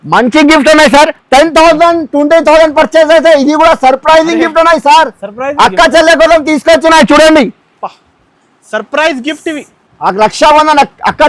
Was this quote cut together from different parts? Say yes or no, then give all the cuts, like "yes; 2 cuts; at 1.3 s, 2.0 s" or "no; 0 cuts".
no; 0 cuts